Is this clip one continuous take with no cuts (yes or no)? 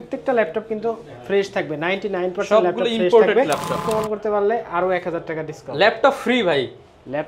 no